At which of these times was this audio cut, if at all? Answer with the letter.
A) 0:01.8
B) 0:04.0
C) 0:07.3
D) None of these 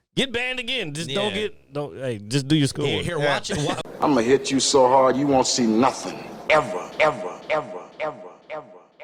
B